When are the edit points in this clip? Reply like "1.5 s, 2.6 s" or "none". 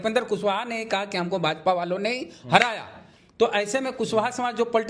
none